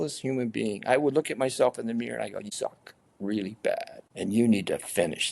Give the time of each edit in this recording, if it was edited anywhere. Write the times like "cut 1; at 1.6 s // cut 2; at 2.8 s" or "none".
cut 1; at 2.4 s // cut 2; at 4.0 s